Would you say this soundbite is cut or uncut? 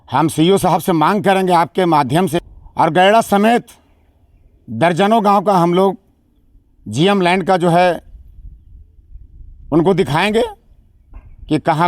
cut